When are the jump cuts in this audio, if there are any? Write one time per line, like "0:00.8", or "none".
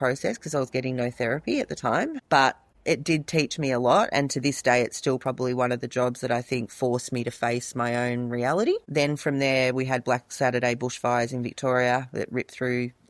0:02.7

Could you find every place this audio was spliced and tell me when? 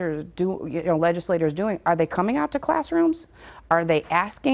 none

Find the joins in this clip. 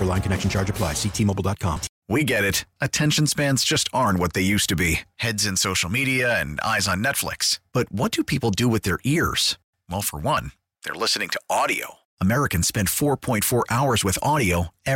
0:01.9

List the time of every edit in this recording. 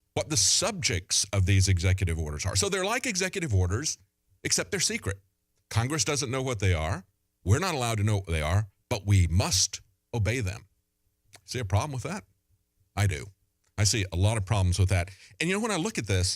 0:13.9

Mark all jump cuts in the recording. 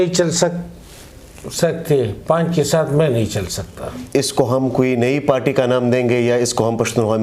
0:04.0

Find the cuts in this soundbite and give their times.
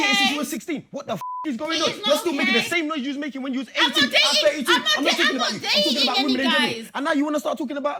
none

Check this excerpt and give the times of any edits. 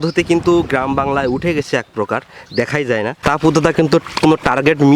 0:03.2

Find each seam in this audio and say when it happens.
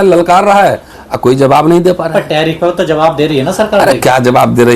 none

